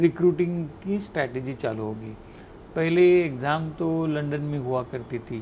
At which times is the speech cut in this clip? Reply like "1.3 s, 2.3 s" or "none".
none